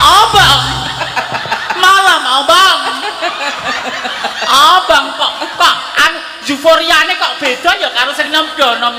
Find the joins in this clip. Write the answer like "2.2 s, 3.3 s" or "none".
none

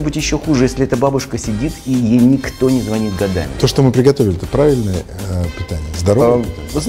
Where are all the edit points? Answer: 3.6 s

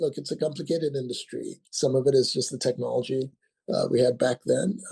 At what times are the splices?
1.6 s

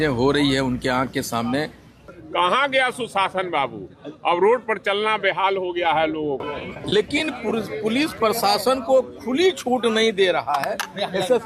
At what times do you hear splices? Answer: 2.0 s, 6.4 s

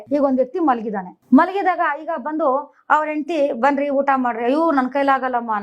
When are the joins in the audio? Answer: 1.1 s

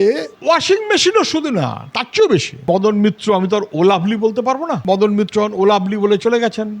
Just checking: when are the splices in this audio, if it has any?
2.7 s, 4.8 s

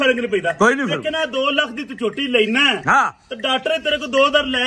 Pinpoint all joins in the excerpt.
none

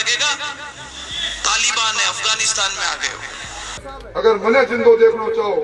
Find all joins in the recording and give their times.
3.9 s

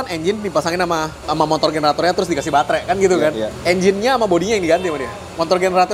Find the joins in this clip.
1.2 s, 3.5 s

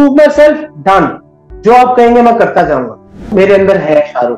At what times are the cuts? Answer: 3.3 s

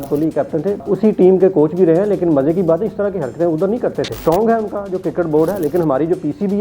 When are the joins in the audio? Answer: 0.8 s, 4.1 s

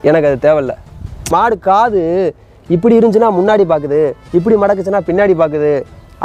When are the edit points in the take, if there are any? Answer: 1.3 s

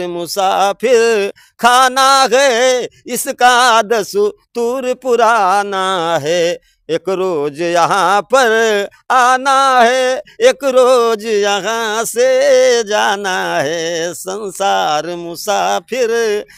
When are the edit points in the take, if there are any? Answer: none

